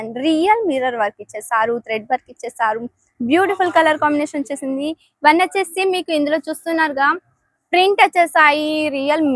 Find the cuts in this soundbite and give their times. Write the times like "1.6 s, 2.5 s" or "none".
none